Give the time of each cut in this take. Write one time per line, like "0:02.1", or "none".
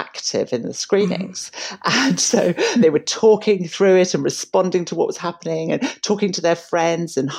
none